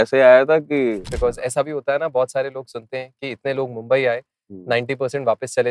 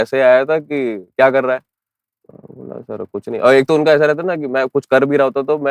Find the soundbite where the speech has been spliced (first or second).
first